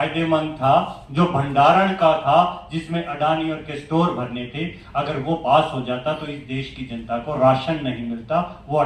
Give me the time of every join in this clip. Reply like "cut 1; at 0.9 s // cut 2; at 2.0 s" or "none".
none

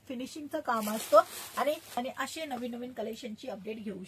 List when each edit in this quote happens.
cut 1; at 1.9 s

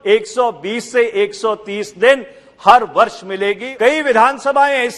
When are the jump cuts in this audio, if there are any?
cut 1; at 3.7 s

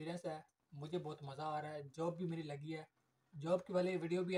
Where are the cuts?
none

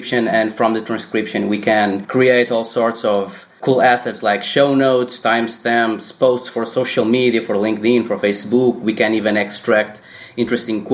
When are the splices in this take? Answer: cut 1; at 2.0 s // cut 2; at 3.4 s

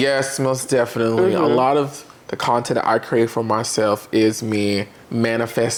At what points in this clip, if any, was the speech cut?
none

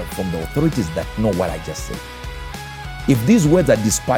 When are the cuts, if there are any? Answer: none

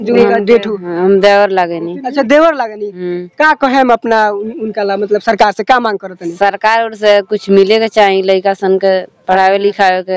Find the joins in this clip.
none

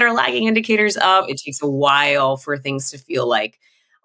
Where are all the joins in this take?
cut 1; at 1.3 s

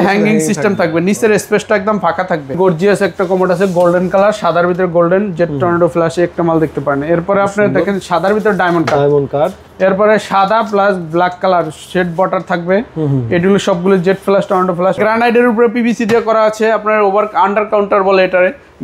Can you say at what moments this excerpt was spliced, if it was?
cut 1; at 2.6 s // cut 2; at 15.0 s

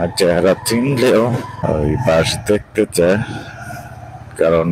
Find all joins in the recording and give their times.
cut 1; at 1.5 s

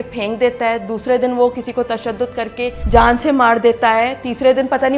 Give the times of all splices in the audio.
cut 1; at 2.8 s

